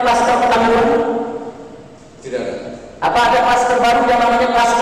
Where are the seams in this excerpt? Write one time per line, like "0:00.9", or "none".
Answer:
none